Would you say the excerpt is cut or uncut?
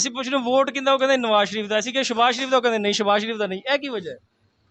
uncut